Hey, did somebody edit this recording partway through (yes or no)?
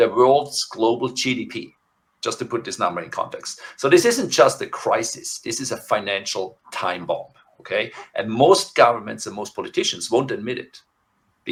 no